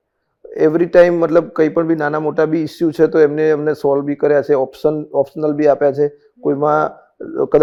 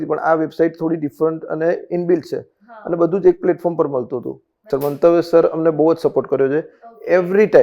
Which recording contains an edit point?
second; 1 cut; at 4.7 s

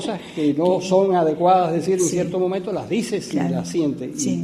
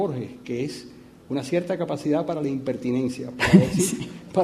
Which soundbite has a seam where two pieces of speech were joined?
second; 1 cut; at 2.8 s

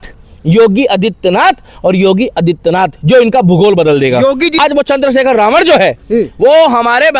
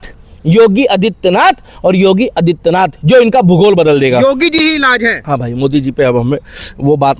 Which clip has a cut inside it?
first; 1 cut; at 4.6 s

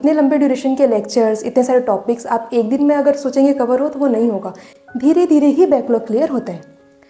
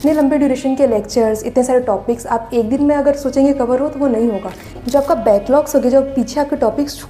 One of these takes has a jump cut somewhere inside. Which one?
second; 1 cut; at 4.8 s

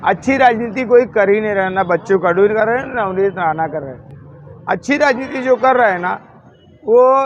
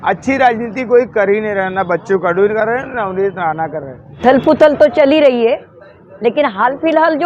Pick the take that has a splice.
second; 1 cut; at 4.1 s

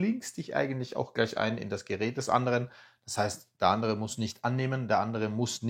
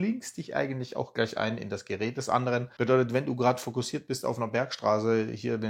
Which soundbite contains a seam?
second; 1 cut; at 2.7 s

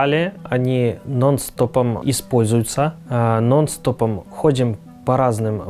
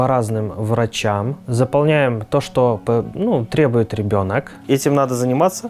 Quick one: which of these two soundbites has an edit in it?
second; 1 cut; at 4.5 s

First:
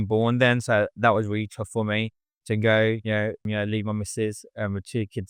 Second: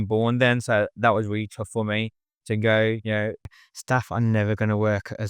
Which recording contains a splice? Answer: second; 1 cut; at 3.5 s

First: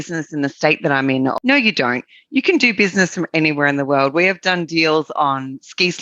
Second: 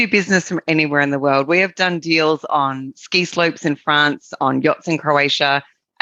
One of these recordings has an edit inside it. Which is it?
first; 1 cut; at 1.3 s

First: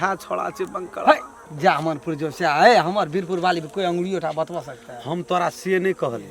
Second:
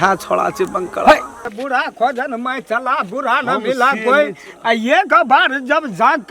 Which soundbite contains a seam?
second; 1 cut; at 1.5 s

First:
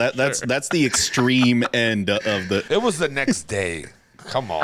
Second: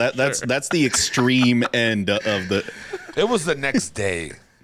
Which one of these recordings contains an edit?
first; 1 cut; at 2.7 s

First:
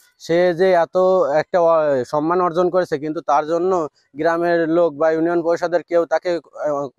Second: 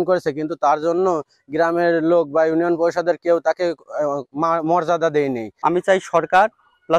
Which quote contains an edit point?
second; 1 cut; at 5.5 s

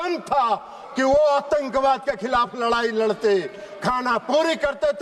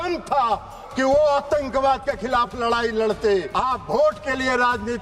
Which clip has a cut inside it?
second; 1 cut; at 3.5 s

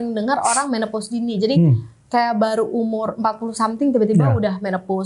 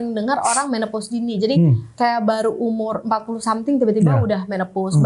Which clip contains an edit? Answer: second; 1 cut; at 1.8 s

